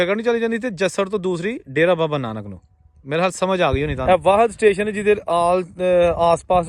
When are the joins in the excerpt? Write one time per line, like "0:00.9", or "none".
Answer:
0:04.0